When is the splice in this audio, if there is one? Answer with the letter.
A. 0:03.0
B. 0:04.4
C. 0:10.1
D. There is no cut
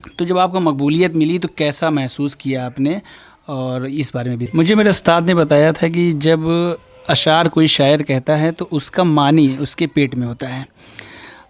B